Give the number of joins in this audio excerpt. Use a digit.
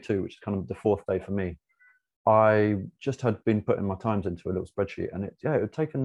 0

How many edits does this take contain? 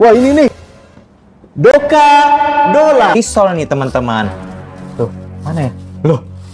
1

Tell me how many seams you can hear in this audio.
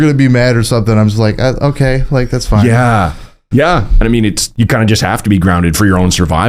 1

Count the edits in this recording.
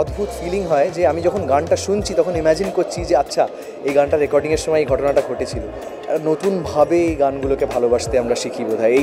0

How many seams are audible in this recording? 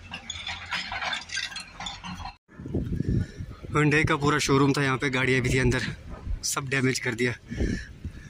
1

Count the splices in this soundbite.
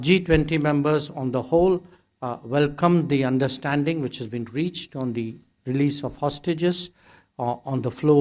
0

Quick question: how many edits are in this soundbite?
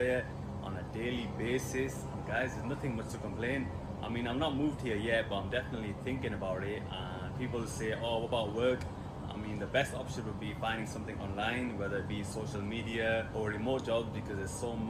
0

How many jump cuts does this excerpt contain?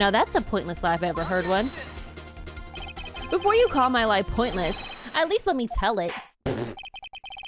0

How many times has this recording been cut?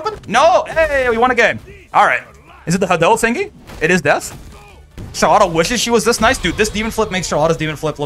0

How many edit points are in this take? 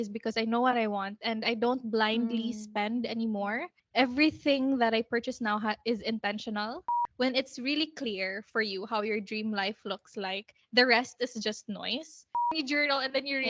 3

